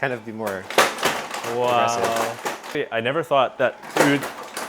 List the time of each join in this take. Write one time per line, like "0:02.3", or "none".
0:02.7